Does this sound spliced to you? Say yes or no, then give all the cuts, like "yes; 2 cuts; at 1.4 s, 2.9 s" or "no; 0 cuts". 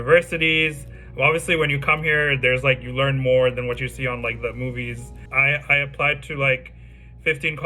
yes; 1 cut; at 5.2 s